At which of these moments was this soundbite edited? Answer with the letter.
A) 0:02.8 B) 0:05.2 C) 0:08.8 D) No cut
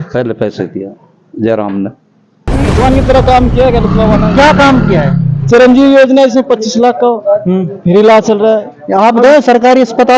A